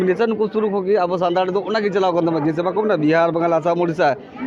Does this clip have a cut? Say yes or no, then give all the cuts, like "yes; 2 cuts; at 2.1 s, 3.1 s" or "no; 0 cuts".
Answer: no; 0 cuts